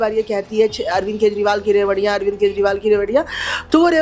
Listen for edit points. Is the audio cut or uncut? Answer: uncut